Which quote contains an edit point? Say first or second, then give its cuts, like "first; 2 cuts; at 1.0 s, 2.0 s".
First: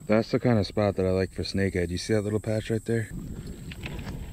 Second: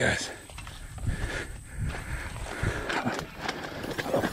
first; 1 cut; at 3.1 s